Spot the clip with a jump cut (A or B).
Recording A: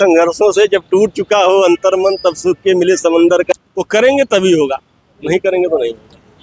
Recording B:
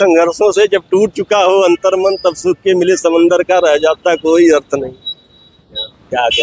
A